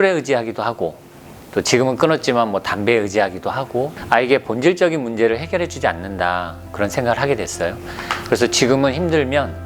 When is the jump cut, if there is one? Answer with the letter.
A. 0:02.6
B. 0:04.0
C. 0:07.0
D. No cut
B